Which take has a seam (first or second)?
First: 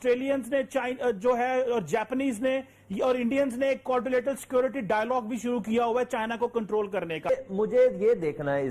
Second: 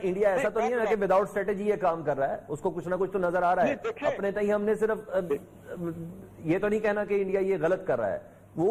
first